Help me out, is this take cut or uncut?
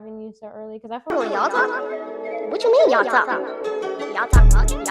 cut